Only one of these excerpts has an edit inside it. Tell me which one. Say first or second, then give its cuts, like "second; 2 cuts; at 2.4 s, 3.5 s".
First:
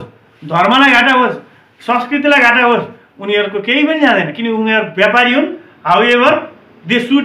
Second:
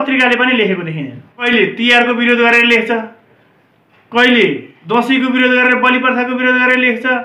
second; 2 cuts; at 1.5 s, 4.7 s